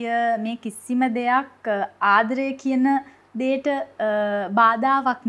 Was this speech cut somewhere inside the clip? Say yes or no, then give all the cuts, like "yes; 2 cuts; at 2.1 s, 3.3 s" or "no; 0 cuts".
no; 0 cuts